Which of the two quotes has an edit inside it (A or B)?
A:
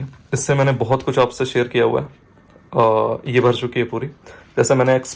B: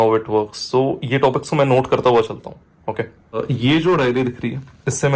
B